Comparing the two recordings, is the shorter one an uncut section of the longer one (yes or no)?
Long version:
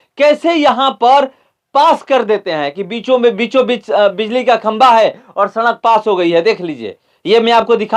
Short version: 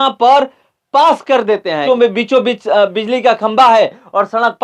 no